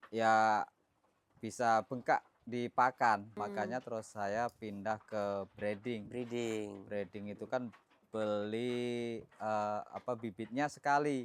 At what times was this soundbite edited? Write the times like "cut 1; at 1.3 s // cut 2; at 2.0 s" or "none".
cut 1; at 3.4 s

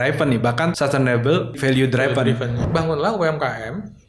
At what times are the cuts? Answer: cut 1; at 0.8 s // cut 2; at 1.6 s // cut 3; at 2.6 s

